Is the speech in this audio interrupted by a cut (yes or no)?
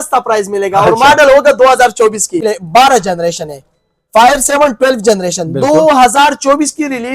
yes